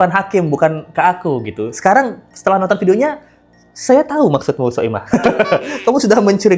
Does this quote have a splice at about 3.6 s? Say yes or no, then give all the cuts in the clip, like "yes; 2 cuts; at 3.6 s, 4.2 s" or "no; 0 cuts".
no; 0 cuts